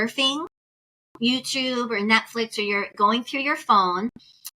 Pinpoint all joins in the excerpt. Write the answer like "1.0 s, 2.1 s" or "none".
none